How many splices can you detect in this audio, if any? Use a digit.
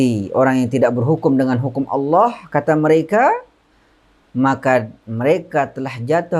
0